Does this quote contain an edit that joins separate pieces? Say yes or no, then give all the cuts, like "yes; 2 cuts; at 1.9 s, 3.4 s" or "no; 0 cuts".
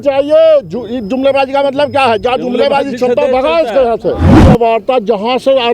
yes; 1 cut; at 4.4 s